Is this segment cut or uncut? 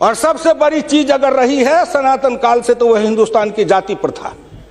uncut